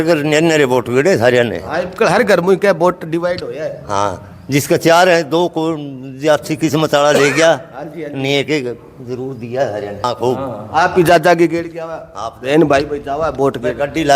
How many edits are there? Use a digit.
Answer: 1